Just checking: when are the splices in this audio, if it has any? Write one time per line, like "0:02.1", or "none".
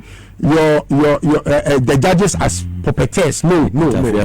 0:02.1